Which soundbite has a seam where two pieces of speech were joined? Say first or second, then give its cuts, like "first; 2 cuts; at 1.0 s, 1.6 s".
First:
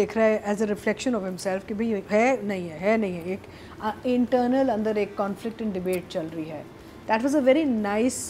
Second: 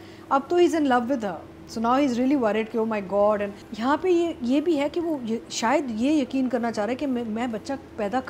second; 1 cut; at 3.6 s